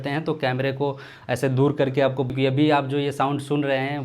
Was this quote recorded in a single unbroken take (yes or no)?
no